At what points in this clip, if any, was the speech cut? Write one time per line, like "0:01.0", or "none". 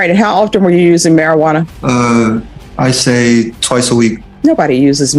0:01.7
0:02.6
0:04.3